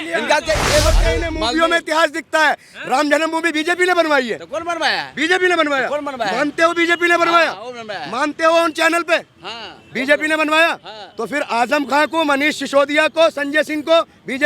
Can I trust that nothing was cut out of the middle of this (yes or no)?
no